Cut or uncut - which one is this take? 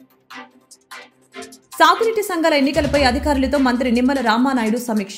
cut